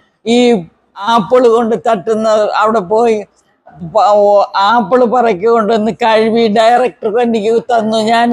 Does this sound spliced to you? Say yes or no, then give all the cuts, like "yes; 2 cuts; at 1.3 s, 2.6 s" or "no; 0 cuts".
yes; 1 cut; at 1.1 s